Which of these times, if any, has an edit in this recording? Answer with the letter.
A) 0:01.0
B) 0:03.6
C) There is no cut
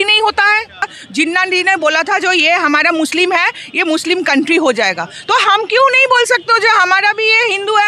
A